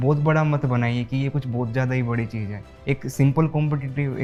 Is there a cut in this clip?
no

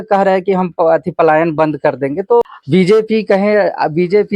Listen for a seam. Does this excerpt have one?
yes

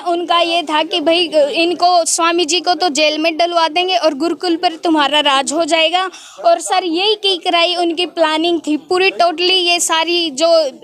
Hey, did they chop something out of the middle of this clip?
no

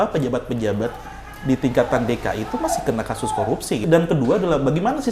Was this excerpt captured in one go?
yes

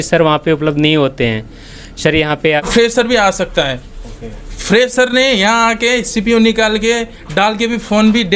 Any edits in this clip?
yes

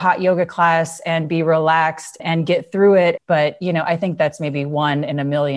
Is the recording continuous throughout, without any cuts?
no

